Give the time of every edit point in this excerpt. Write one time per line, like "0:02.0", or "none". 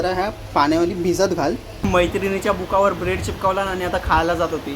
0:01.8